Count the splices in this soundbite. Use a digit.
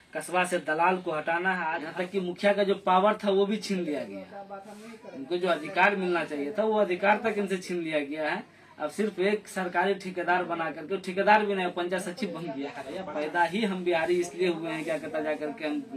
2